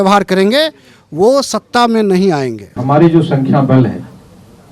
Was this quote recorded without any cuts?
no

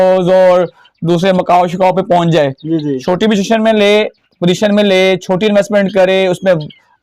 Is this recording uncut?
yes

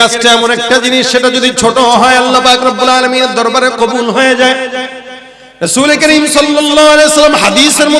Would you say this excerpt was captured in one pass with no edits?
yes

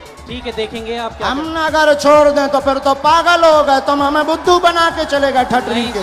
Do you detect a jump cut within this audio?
no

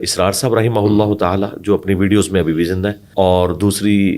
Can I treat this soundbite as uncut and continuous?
no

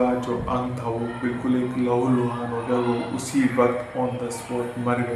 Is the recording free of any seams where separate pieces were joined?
yes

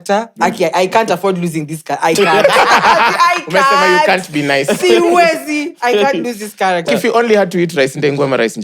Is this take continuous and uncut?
no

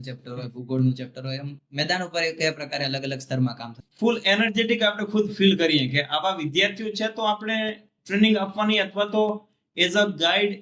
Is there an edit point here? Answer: yes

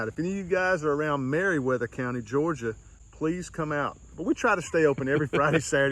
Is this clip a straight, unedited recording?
no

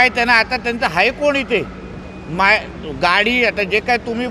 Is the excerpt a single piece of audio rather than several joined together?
yes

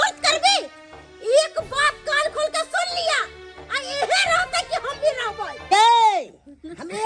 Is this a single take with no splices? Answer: no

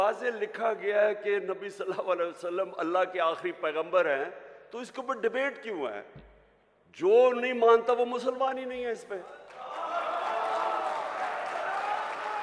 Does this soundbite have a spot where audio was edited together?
no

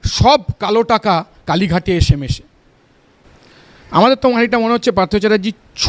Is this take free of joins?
no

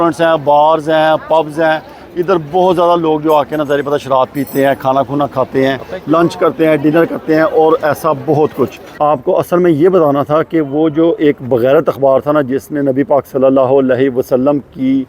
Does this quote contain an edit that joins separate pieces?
yes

